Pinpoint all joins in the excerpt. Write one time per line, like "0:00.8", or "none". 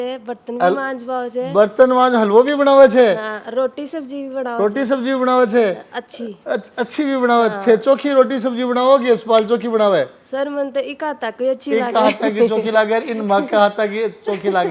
none